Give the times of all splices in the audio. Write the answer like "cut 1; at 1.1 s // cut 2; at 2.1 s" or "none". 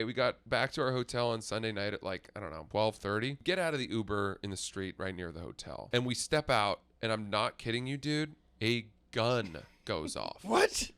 cut 1; at 2.6 s // cut 2; at 3.4 s // cut 3; at 5.8 s